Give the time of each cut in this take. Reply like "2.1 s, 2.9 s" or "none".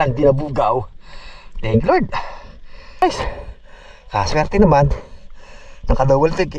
3.0 s